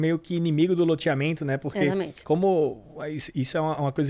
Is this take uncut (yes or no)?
yes